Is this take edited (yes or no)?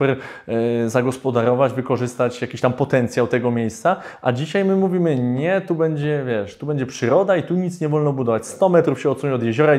no